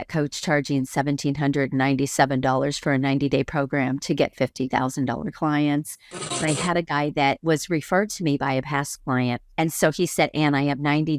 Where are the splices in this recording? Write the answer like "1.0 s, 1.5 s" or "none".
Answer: 6.5 s, 9.4 s